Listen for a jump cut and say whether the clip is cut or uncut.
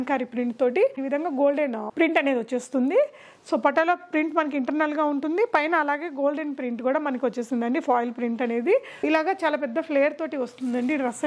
cut